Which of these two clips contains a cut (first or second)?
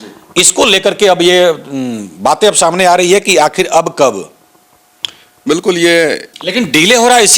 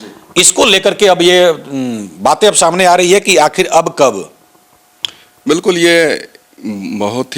first